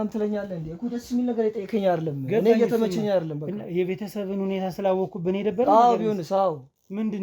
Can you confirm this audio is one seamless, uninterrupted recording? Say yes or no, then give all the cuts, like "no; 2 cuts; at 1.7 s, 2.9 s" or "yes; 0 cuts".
yes; 0 cuts